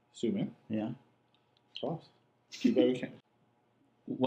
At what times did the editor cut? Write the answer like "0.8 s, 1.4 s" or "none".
3.1 s